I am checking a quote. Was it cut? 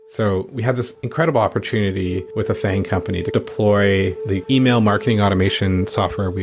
yes; 2 cuts; at 1.0 s, 2.3 s

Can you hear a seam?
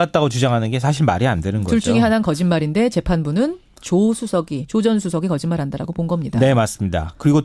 yes; 1 cut; at 3.4 s

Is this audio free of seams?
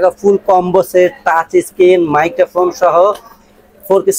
yes; 0 cuts

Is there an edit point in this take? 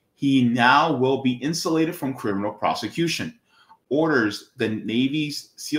yes; 1 cut; at 3.9 s

